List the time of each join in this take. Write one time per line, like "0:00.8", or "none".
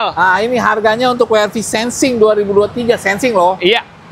none